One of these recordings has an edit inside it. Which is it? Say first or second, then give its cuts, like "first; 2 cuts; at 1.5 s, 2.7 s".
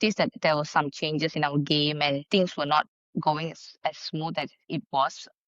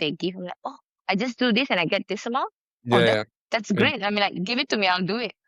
first; 1 cut; at 2.2 s